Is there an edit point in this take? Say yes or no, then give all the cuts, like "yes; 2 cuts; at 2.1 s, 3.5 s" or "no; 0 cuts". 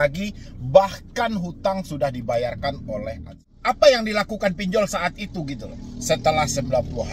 yes; 1 cut; at 3.3 s